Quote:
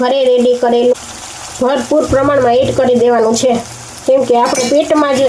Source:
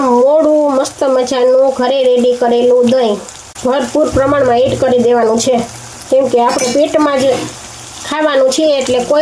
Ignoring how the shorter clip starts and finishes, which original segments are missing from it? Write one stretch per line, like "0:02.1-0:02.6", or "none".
0:02.7-0:03.0